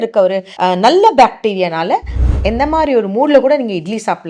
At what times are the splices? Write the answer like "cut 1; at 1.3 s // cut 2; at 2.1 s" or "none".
cut 1; at 2.3 s